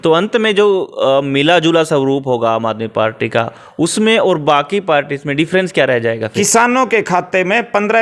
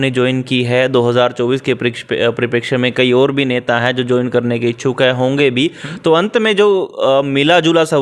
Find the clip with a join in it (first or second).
first